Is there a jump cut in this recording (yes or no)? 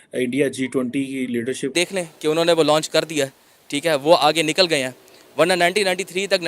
yes